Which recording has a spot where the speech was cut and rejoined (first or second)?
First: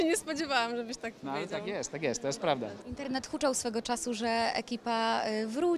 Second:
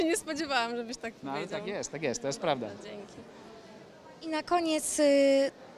first